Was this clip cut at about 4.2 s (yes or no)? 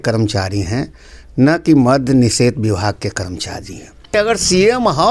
yes